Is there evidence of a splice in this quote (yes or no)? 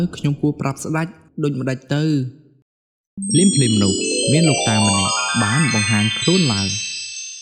no